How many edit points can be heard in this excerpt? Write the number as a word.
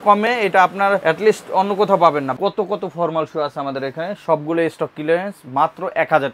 one